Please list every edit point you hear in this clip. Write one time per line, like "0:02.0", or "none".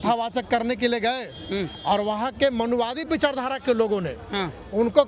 none